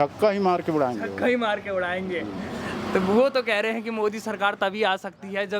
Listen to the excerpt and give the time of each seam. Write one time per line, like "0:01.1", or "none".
none